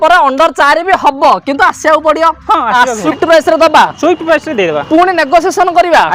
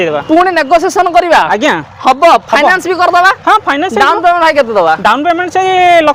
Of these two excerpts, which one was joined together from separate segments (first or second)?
first